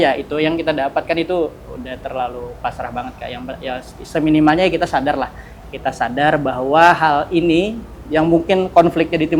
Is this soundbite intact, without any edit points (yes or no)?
yes